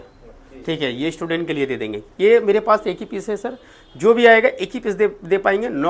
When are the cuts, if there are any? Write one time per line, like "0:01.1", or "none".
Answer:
none